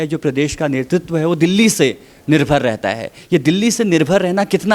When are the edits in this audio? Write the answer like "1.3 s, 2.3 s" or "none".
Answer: none